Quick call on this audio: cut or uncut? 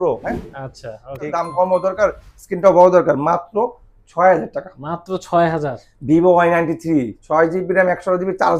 cut